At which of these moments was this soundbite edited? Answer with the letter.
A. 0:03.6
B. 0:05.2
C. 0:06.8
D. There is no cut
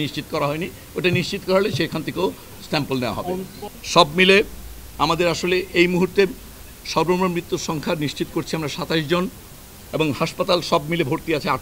A